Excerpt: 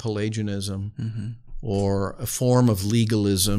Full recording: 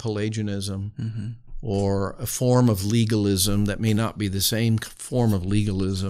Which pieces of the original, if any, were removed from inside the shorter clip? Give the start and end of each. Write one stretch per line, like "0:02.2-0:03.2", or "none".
none

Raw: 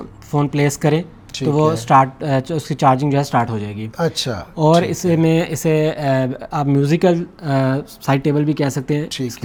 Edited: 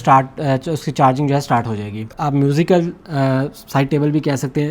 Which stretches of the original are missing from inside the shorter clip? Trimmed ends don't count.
0:03.9-0:06.4

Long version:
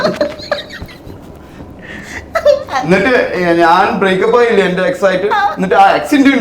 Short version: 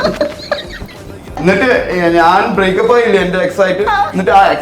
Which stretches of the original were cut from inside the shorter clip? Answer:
0:01.4-0:02.8

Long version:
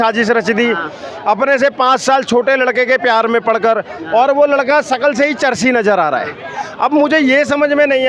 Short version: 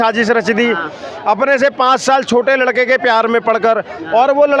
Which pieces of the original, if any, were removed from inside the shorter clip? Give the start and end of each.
none

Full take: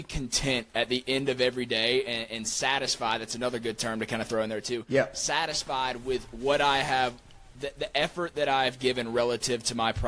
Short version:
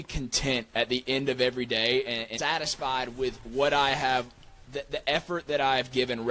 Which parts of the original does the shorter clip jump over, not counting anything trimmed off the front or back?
0:02.3-0:05.2

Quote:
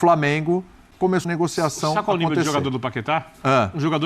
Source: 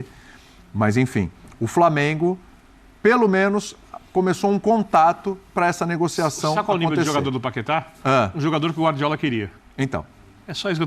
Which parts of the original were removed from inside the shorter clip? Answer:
0:02.9-0:05.8

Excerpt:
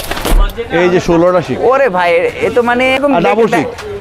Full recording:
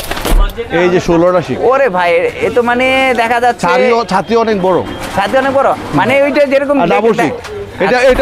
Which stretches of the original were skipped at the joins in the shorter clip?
0:03.0-0:06.6

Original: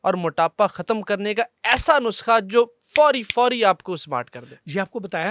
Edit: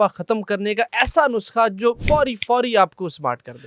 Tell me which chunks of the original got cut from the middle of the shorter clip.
0:01.5-0:01.6
0:02.7-0:02.9

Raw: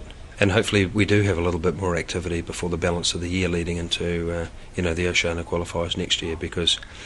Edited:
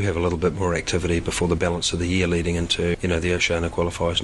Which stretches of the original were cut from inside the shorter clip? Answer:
0:04.2-0:04.7

